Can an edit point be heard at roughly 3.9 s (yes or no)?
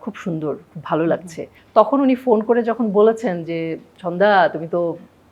no